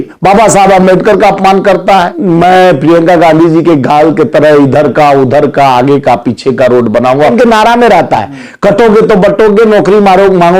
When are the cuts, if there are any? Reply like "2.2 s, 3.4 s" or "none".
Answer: 2.1 s, 7.3 s